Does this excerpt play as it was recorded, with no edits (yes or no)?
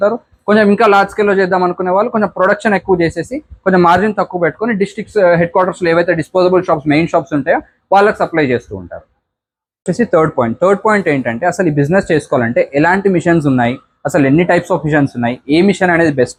yes